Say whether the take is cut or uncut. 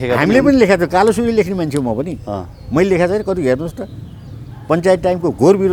uncut